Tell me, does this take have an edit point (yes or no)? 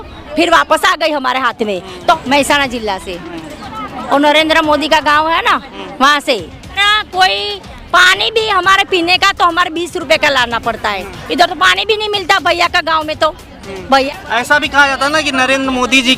yes